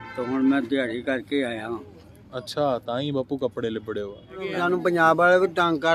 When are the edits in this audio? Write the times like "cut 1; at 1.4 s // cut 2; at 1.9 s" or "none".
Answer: cut 1; at 4.6 s